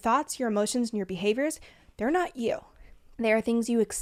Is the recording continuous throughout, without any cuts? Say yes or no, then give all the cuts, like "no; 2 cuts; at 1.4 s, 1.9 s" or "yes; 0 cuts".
yes; 0 cuts